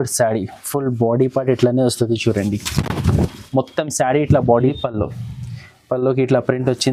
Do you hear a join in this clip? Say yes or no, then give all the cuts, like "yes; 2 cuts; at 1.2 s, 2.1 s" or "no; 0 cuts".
yes; 1 cut; at 4.7 s